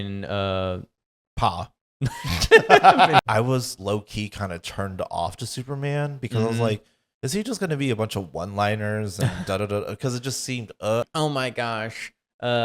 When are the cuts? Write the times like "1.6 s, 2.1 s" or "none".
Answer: 3.2 s, 11.0 s